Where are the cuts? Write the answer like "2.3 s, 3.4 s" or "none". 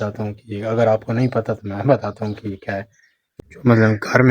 3.3 s